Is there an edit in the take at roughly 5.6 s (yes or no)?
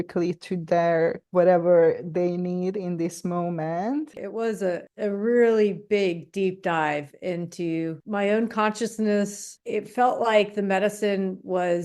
no